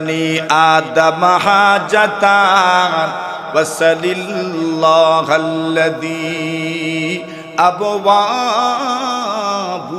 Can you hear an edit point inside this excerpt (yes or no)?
no